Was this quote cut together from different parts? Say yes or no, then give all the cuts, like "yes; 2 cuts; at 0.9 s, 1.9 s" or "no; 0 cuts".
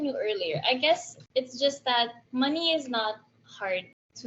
yes; 2 cuts; at 1.1 s, 2.2 s